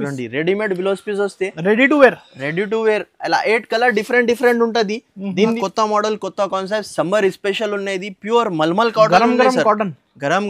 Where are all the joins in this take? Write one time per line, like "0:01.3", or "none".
0:05.6